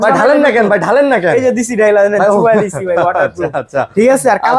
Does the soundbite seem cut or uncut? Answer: uncut